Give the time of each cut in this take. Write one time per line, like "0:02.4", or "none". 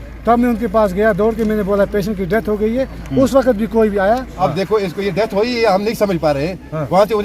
0:04.3